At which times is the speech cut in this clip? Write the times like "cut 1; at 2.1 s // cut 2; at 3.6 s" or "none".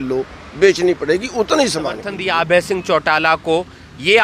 cut 1; at 1.5 s